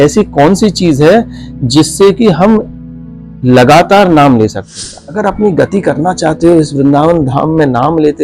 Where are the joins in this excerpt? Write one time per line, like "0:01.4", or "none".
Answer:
0:05.0